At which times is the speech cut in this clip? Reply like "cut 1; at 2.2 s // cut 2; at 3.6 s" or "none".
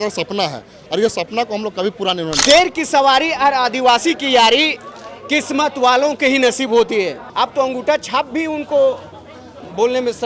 cut 1; at 2.3 s // cut 2; at 7.2 s